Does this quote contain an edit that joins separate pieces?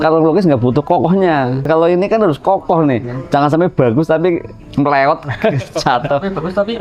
yes; 1 cut; at 1.7 s

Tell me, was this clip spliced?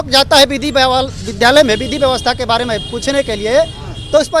no; 0 cuts

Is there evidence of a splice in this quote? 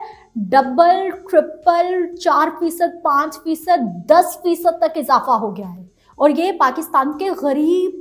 no; 0 cuts

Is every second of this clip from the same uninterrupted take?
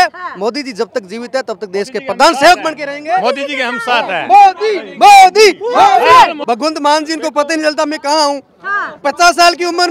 no; 1 cut; at 6.4 s

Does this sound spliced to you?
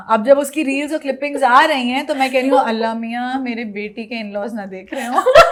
no; 0 cuts

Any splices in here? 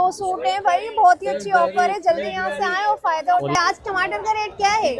yes; 1 cut; at 3.5 s

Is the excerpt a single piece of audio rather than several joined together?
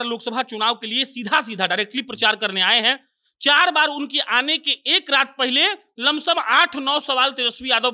yes; 0 cuts

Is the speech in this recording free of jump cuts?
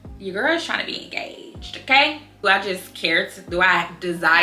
no; 1 cut; at 2.4 s

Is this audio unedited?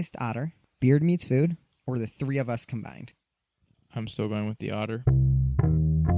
no; 1 cut; at 5.0 s

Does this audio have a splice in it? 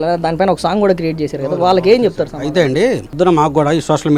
no; 0 cuts

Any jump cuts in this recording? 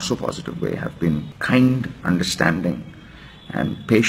yes; 1 cut; at 1.3 s

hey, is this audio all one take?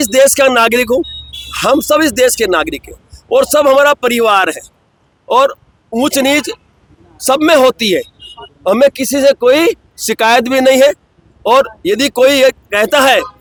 yes; 0 cuts

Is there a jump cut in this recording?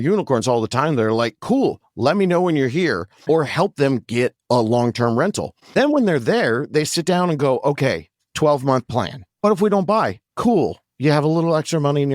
yes; 3 cuts; at 3.2 s, 5.7 s, 9.3 s

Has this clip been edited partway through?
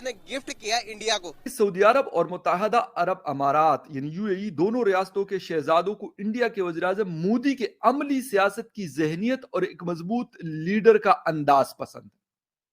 yes; 1 cut; at 1.4 s

